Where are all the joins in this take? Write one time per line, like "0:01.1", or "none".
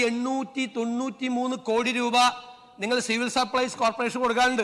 none